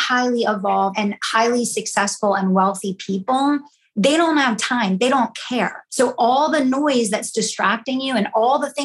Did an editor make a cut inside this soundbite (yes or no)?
yes